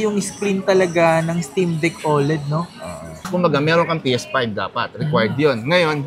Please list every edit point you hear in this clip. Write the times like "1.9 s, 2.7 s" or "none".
3.2 s